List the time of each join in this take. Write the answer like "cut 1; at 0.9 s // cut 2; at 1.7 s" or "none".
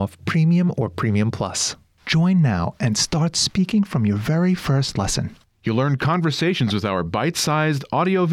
cut 1; at 1.7 s